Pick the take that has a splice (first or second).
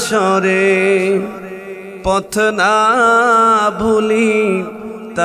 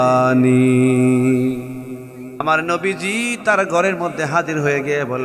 second